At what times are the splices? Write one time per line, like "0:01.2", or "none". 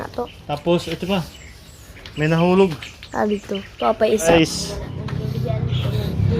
0:04.3